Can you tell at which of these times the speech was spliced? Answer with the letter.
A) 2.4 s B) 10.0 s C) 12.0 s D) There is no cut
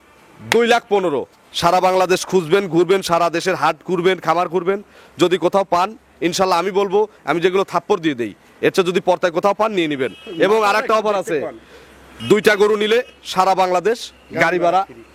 D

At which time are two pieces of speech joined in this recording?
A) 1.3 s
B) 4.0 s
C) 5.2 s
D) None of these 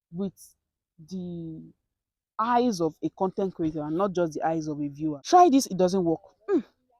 C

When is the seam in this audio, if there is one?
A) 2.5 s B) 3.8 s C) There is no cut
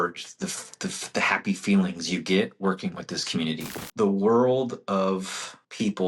B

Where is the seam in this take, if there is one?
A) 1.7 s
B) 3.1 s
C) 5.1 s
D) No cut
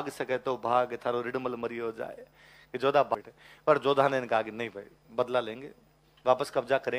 B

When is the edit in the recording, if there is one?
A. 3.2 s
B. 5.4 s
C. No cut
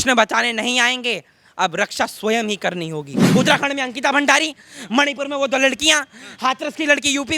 A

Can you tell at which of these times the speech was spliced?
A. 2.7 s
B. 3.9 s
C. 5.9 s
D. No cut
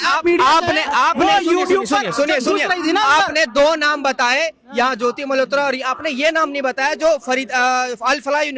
D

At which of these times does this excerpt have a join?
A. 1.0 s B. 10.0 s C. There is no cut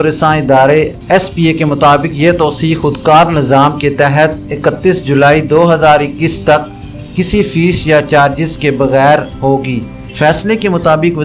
A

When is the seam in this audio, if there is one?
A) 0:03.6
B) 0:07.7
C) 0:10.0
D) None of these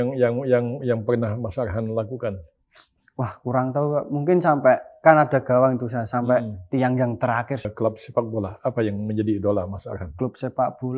B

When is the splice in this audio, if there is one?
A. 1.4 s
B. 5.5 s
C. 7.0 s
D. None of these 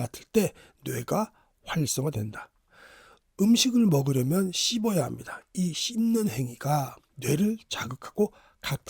D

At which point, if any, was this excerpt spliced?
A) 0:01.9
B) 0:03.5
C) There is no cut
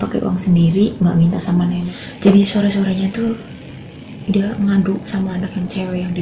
A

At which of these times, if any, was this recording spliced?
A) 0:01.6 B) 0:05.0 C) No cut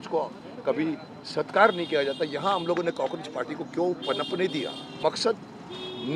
B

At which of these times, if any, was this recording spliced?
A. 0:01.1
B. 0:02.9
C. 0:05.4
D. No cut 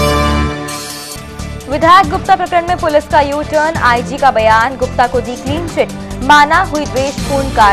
A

